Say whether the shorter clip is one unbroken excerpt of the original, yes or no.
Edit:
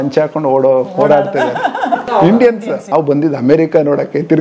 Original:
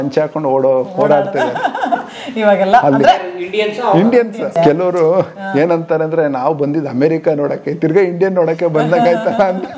no